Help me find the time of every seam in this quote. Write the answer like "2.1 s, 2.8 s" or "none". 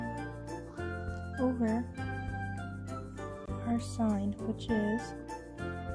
1.9 s, 3.7 s